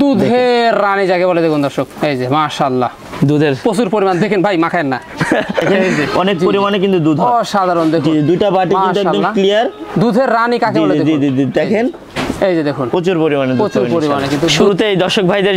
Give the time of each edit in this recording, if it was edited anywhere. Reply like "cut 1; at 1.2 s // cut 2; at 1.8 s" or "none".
cut 1; at 6.1 s // cut 2; at 14.6 s